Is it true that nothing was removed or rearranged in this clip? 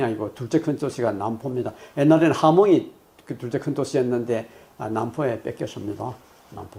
yes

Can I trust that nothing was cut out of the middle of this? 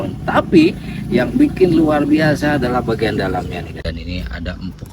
no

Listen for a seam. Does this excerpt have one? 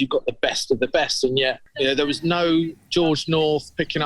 yes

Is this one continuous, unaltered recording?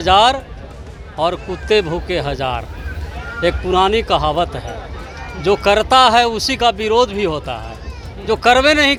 yes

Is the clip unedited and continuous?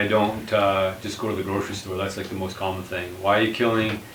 yes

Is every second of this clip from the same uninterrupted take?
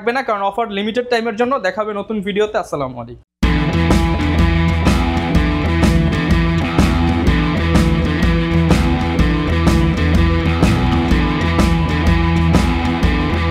yes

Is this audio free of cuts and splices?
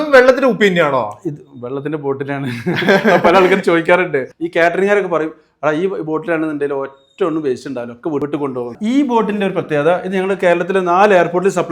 no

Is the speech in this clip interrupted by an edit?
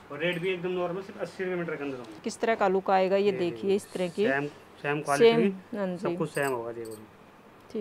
yes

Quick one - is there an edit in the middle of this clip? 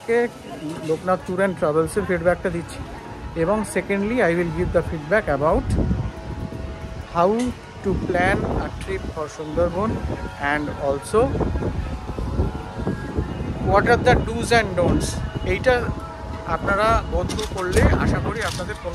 no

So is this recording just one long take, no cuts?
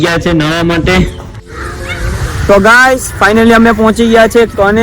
no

